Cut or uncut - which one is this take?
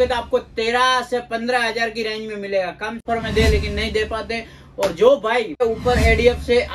cut